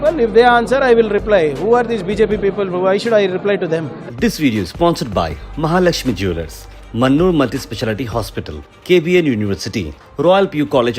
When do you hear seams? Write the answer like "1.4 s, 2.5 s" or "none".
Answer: 4.0 s